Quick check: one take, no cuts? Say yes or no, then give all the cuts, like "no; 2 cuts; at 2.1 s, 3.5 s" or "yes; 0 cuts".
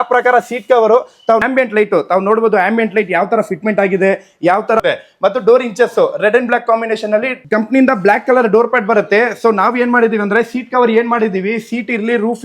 no; 3 cuts; at 1.4 s, 4.8 s, 7.4 s